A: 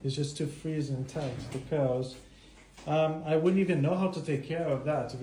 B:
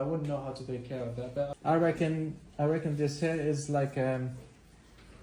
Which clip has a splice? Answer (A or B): B